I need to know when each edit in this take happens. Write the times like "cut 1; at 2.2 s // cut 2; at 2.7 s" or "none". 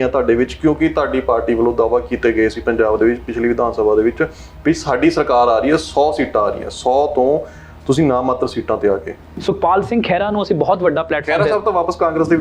cut 1; at 9.3 s